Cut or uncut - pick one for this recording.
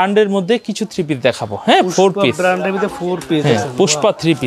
uncut